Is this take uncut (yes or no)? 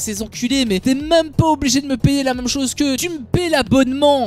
no